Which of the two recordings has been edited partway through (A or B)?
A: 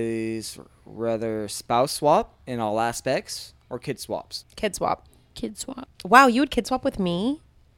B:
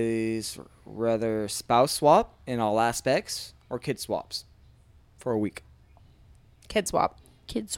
A